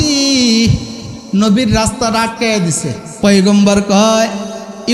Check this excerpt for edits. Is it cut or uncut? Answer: cut